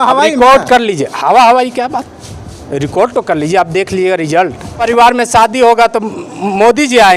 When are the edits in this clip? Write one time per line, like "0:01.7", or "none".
0:04.8